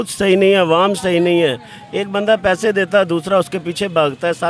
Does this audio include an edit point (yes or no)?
no